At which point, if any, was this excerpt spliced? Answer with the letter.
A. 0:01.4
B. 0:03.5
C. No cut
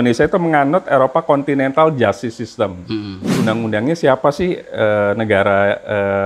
B